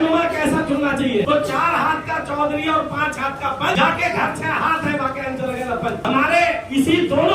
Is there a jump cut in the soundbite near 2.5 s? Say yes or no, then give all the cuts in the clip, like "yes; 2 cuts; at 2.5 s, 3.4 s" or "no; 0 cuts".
no; 3 cuts; at 1.3 s, 3.7 s, 6.0 s